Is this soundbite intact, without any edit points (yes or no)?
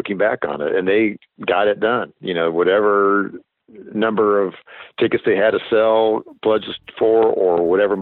yes